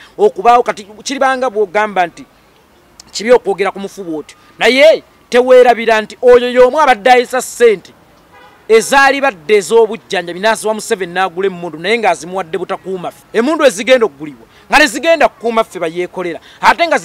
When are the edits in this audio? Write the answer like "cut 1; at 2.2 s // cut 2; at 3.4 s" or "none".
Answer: cut 1; at 13.2 s